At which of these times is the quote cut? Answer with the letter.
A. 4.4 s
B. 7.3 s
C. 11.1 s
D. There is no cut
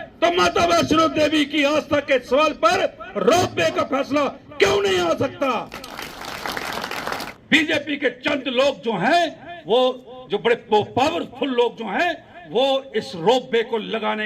B